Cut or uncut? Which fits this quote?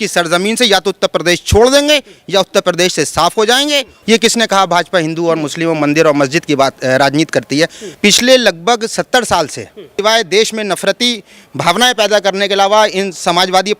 cut